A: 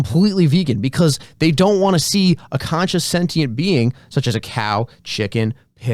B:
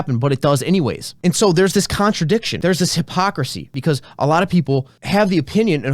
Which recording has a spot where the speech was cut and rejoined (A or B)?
B